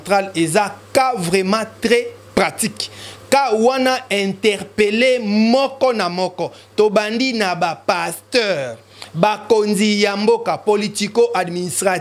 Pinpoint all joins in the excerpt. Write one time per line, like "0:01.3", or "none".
none